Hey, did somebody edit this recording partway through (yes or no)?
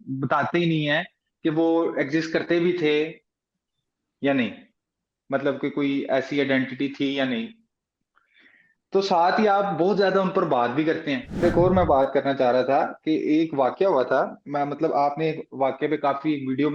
yes